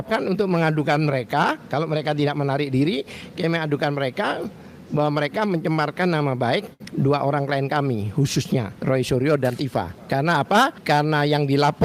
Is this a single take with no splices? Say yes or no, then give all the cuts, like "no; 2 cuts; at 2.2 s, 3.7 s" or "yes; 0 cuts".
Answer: no; 4 cuts; at 6.8 s, 8.7 s, 10.0 s, 10.8 s